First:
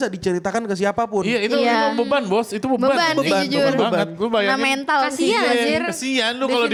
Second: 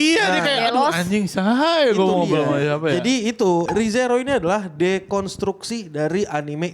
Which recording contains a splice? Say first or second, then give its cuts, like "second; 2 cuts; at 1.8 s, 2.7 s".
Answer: second; 1 cut; at 3.6 s